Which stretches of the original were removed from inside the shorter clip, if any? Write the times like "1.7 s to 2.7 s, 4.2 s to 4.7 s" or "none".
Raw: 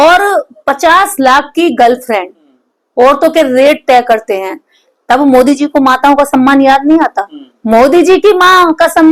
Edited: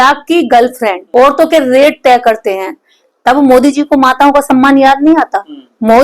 2.3 s to 2.8 s